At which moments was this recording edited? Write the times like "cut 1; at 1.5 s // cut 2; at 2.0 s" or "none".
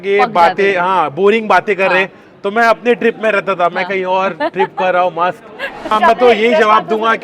cut 1; at 5.9 s